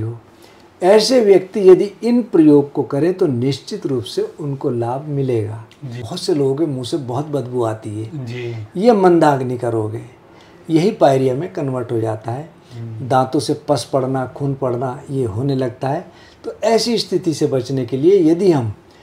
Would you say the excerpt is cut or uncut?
cut